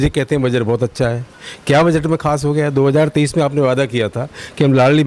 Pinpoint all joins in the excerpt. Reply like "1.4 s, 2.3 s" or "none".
none

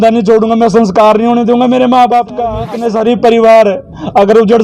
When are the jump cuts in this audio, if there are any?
2.6 s

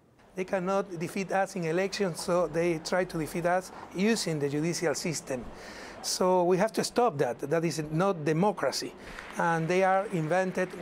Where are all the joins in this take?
7.9 s

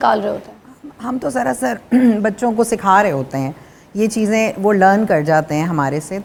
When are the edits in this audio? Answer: none

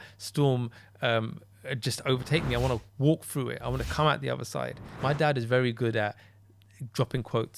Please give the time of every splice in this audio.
4.9 s

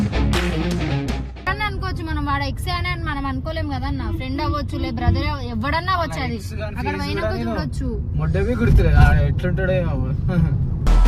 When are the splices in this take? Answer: 1.5 s

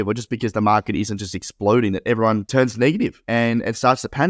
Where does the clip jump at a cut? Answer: 2.5 s, 3.2 s

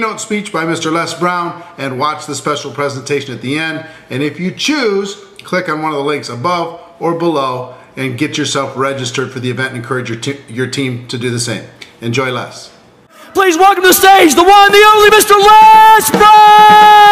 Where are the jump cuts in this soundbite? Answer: 3.3 s

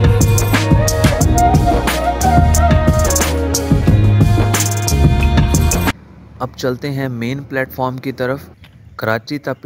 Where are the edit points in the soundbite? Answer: none

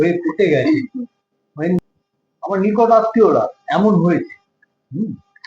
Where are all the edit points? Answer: 1.8 s

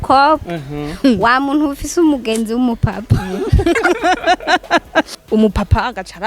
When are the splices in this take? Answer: 5.1 s

